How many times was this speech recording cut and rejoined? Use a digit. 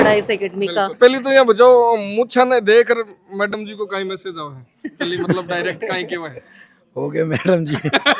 1